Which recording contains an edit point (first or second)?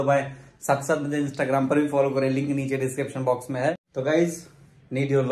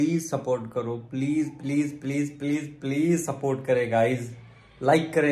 first